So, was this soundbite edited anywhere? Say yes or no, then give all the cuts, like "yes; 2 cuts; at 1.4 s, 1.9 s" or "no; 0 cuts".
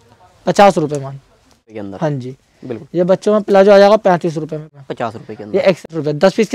yes; 3 cuts; at 1.8 s, 4.6 s, 5.9 s